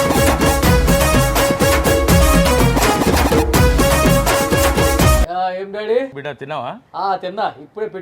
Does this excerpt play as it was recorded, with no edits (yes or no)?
no